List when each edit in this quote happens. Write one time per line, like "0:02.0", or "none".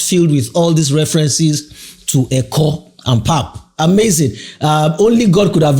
none